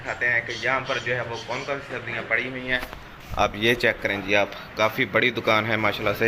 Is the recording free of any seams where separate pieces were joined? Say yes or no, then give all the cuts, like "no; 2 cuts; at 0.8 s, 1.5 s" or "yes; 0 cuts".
yes; 0 cuts